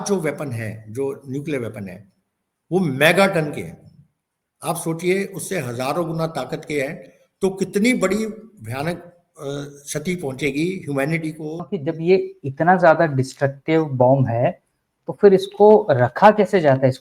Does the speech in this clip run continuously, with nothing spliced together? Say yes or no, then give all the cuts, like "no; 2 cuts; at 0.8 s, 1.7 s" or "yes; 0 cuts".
no; 1 cut; at 11.7 s